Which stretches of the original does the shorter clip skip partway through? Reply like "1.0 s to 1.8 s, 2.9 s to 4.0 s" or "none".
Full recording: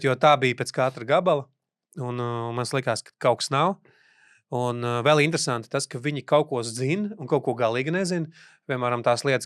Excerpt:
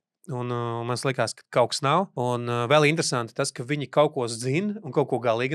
3.8 s to 4.5 s